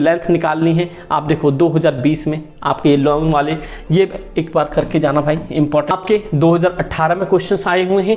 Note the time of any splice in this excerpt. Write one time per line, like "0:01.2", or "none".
0:05.9

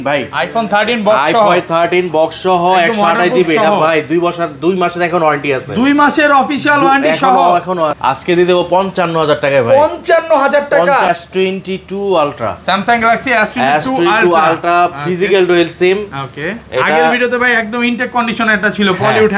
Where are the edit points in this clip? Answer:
0:08.0
0:11.1

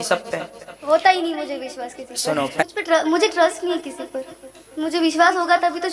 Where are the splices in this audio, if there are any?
0:02.6

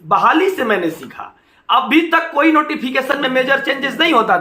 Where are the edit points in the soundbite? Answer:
none

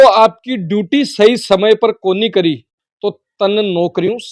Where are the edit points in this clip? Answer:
none

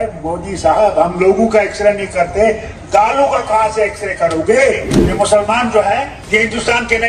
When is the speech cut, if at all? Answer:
0:05.0
0:06.2

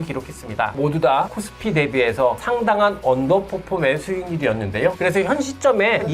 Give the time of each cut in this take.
0:01.3
0:02.4

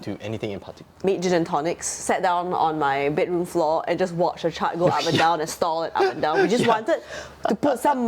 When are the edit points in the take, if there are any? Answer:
0:01.0

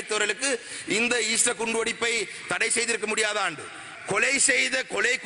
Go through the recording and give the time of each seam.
0:03.9

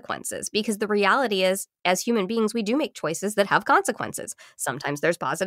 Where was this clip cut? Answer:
none

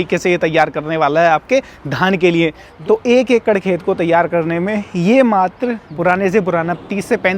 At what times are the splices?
0:02.7
0:05.9

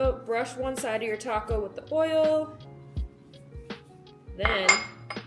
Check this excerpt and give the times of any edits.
none

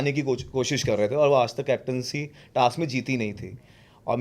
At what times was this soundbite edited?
none

